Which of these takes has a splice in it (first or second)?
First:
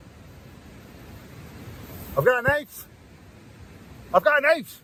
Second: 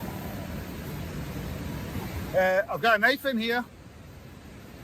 second